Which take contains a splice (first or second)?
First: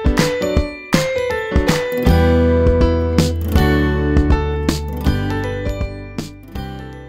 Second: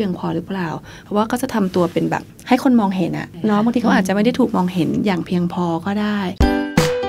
second